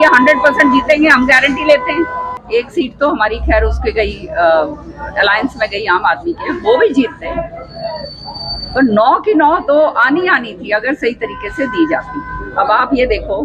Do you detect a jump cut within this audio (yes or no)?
yes